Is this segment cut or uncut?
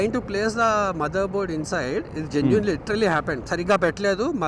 uncut